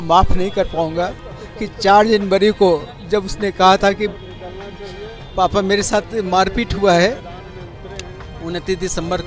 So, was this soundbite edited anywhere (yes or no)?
no